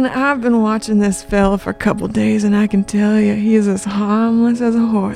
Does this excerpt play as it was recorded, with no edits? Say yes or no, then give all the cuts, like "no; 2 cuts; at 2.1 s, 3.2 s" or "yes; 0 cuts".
yes; 0 cuts